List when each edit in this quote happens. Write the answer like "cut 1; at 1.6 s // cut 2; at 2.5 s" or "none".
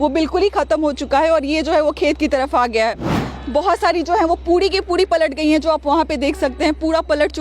none